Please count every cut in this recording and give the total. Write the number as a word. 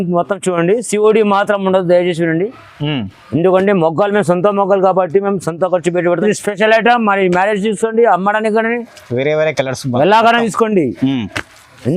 one